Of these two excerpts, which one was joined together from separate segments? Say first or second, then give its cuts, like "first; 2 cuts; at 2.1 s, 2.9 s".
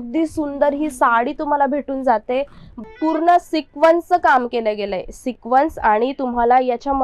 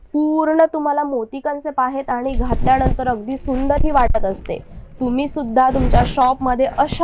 first; 1 cut; at 2.7 s